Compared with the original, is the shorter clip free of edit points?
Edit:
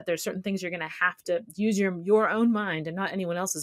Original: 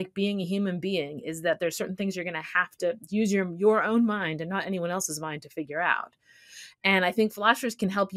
yes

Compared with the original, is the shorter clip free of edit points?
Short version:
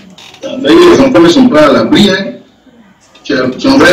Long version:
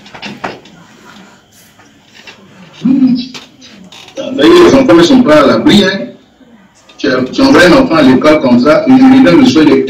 yes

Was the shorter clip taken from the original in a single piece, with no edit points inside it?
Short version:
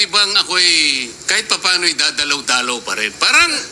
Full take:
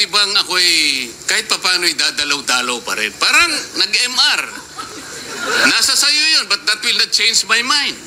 yes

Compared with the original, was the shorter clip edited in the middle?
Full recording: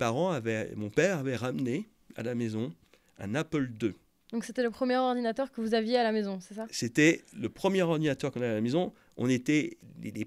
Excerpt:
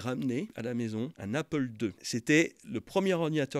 yes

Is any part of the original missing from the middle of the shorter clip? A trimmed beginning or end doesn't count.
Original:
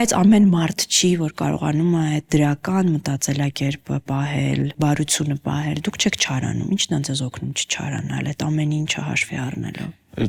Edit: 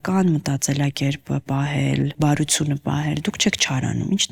no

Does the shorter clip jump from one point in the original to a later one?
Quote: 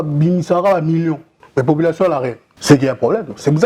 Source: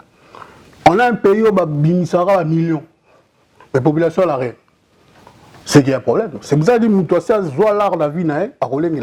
yes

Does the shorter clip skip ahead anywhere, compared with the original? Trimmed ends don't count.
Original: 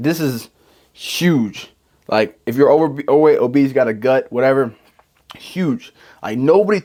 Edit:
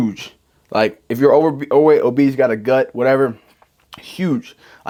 no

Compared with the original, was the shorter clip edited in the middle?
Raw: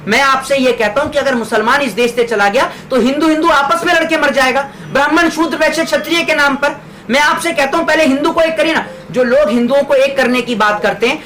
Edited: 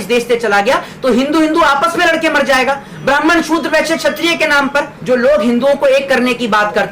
yes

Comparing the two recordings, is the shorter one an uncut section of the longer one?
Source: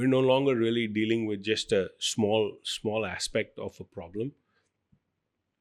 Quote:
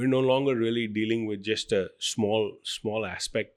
yes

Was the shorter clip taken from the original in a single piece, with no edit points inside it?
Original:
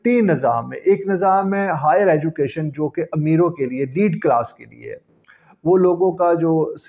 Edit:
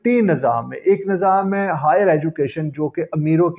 yes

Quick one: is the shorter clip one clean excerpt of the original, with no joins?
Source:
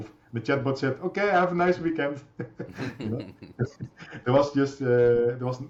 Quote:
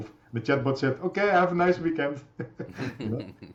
yes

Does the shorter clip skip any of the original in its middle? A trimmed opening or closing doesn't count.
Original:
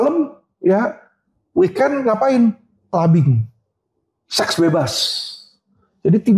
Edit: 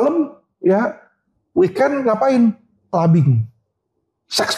no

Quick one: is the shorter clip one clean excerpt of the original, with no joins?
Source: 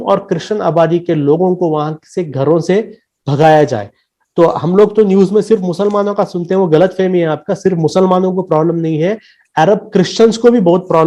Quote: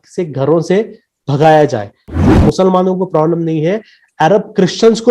no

